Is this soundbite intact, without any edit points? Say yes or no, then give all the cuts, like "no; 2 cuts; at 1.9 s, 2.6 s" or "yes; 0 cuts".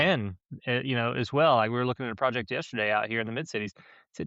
yes; 0 cuts